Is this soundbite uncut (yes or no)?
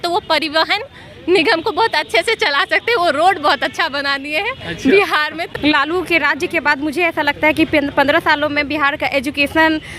no